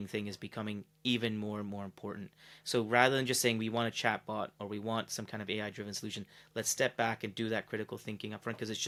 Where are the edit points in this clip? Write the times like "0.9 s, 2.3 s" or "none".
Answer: none